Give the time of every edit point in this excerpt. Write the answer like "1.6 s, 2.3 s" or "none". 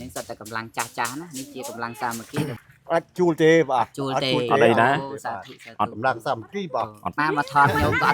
2.6 s, 7.2 s